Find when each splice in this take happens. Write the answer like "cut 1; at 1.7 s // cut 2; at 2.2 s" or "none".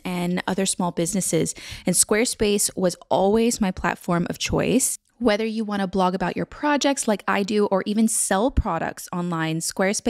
none